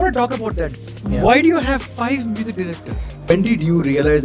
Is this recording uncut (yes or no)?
no